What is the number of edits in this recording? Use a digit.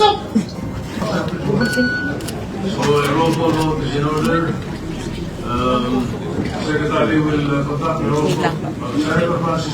1